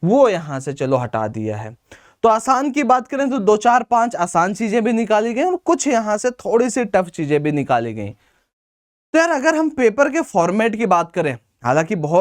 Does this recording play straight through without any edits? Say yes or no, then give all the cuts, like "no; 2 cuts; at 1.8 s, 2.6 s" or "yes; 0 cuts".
yes; 0 cuts